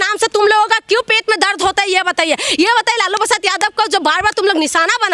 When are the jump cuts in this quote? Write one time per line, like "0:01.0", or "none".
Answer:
none